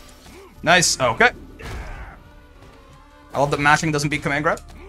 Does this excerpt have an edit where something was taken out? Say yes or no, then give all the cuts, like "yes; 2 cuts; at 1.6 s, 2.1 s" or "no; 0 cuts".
no; 0 cuts